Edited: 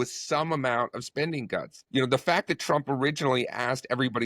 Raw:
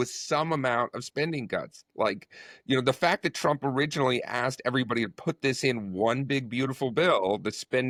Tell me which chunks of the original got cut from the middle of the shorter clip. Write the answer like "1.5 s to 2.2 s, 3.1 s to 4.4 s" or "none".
1.8 s to 2.5 s